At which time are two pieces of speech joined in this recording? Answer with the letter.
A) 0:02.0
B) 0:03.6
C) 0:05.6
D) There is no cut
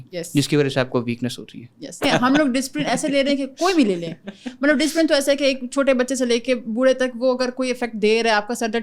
A